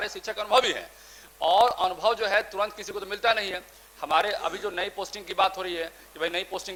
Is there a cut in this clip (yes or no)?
no